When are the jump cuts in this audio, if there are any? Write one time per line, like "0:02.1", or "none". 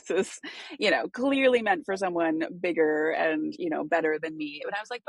none